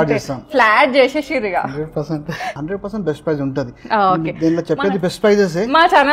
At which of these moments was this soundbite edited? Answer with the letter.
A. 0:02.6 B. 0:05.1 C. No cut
A